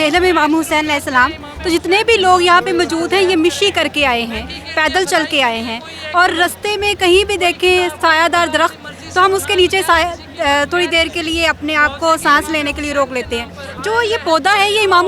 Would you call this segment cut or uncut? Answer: uncut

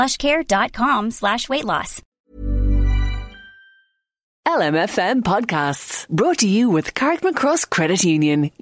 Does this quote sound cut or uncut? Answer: cut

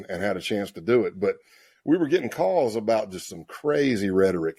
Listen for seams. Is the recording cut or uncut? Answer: uncut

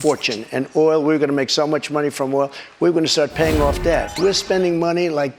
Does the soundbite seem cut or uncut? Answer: cut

